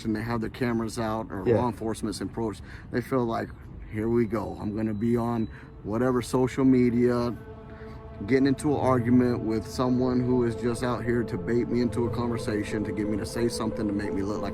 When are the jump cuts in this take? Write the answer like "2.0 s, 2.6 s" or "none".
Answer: none